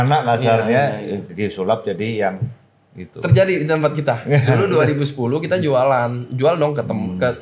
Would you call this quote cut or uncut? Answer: uncut